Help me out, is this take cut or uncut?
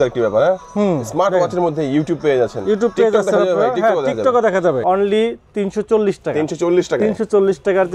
cut